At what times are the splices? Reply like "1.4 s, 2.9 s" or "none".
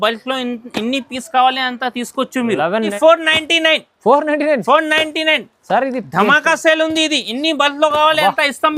3.0 s